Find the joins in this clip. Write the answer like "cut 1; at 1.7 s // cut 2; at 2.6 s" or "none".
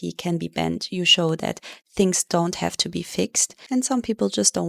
cut 1; at 3.4 s